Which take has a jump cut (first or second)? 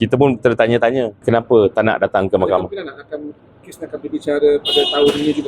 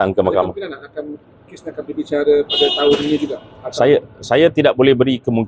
first